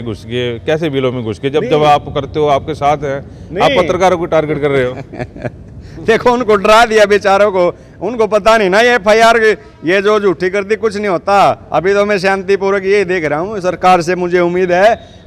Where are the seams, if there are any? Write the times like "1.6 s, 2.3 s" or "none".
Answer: none